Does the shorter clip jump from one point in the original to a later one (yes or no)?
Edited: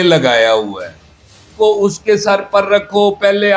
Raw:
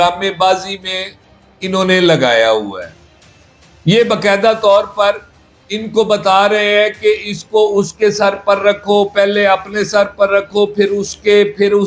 yes